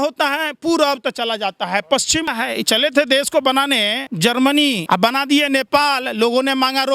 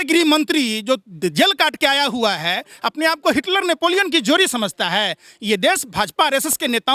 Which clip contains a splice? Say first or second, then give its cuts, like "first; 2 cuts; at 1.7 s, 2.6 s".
first; 3 cuts; at 2.3 s, 4.0 s, 4.8 s